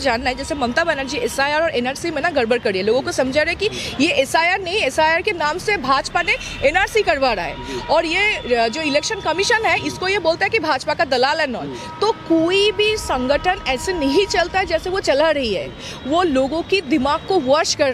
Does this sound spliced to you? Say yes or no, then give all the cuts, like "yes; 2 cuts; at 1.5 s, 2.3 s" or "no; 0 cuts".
no; 0 cuts